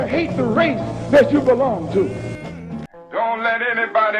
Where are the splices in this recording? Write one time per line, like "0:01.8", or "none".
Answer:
0:02.9